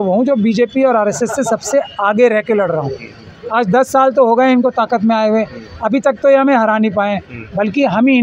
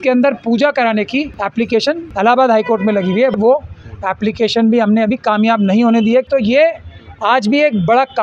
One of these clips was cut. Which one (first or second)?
second